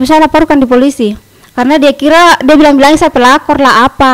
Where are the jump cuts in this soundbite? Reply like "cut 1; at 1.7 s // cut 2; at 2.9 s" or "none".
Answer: none